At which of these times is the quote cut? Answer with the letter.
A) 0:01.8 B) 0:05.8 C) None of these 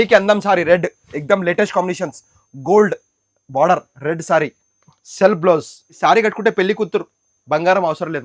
B